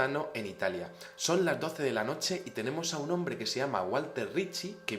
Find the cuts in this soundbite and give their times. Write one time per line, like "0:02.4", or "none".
0:01.7